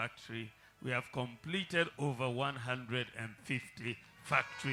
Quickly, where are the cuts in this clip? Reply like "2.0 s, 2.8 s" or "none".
none